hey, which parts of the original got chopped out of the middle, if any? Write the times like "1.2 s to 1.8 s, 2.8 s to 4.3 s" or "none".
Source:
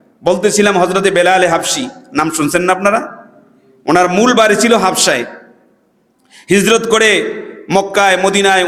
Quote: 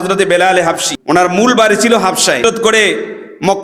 1.8 s to 3.7 s, 5.2 s to 6.7 s